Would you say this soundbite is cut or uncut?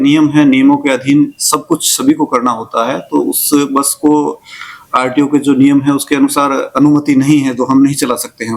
uncut